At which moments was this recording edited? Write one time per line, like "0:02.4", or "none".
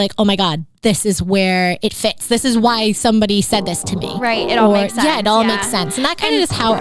none